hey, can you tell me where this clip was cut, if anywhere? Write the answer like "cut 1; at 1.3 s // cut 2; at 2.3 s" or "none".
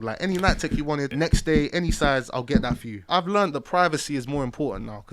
cut 1; at 1.1 s // cut 2; at 3.1 s